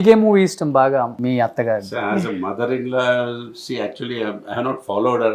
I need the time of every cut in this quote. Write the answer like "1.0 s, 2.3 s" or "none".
1.1 s